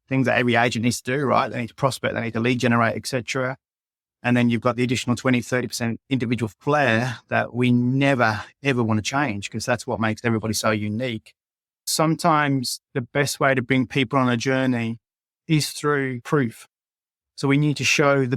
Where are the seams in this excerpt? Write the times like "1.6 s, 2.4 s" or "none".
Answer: 11.9 s, 16.2 s